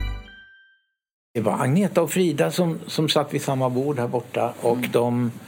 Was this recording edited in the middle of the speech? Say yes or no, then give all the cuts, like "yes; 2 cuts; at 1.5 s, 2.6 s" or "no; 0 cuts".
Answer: yes; 1 cut; at 1.4 s